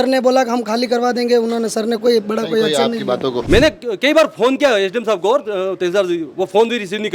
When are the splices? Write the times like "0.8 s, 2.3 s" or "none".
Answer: 3.4 s